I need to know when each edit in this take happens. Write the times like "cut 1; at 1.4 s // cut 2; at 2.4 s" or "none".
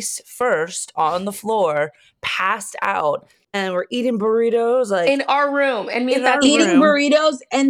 cut 1; at 3.4 s